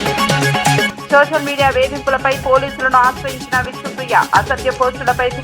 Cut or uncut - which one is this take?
cut